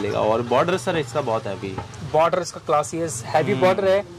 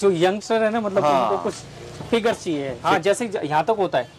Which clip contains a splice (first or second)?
second